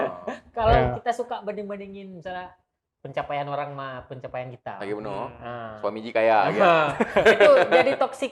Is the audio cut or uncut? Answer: uncut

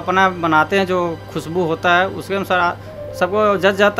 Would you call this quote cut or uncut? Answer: uncut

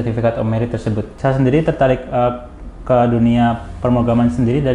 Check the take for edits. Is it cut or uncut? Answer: cut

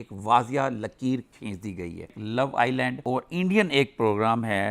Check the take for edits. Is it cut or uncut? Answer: cut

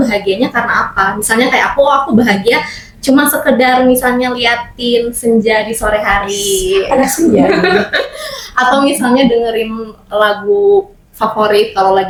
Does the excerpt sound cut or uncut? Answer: uncut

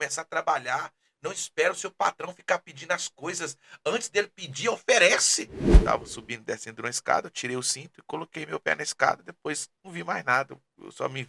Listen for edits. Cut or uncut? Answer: cut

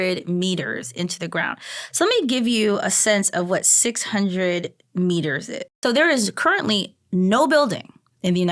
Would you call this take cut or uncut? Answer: cut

